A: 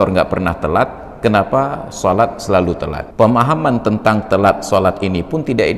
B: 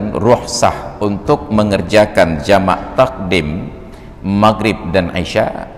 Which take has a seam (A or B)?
A